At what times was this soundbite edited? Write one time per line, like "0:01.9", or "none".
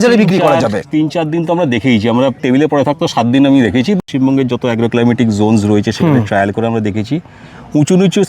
0:02.4
0:04.0